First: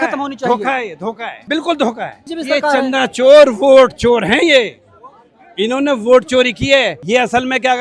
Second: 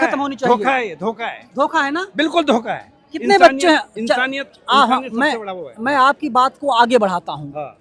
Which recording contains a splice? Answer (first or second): first